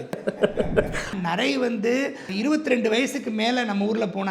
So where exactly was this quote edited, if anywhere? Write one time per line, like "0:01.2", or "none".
0:01.2